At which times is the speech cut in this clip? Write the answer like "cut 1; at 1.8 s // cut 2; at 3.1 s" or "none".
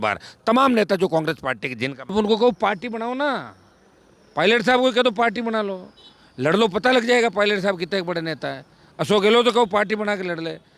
cut 1; at 2.1 s